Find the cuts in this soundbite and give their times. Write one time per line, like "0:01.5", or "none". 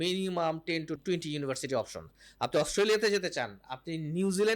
0:01.0